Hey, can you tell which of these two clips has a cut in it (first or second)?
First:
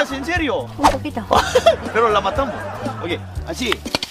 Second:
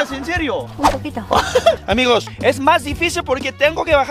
second